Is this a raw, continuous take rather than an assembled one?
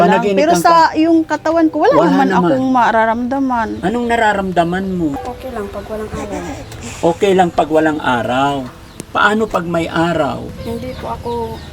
no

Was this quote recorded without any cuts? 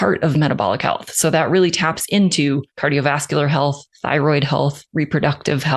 no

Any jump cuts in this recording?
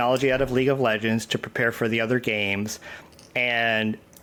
no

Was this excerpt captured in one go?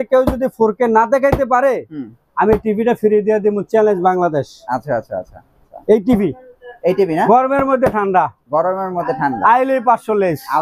yes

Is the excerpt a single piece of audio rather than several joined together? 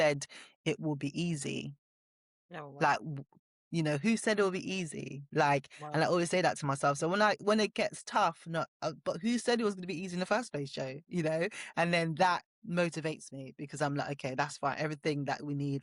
yes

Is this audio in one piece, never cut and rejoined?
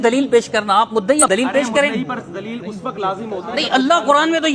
no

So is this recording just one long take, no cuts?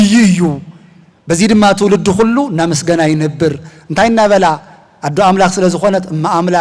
yes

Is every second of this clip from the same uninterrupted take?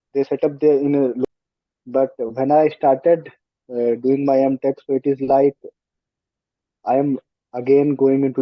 no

